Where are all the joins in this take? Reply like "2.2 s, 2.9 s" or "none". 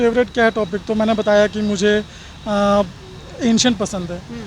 none